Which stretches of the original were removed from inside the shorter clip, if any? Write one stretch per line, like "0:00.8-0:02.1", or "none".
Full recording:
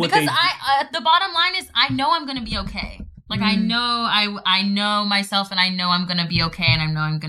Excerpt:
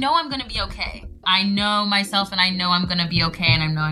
0:03.2-0:04.4